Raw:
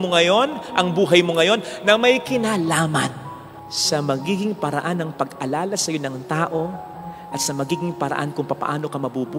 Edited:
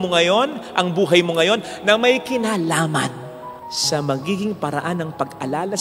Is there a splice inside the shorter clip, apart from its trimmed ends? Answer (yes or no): no